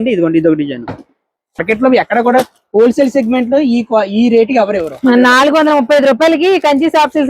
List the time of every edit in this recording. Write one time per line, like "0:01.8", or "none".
0:01.6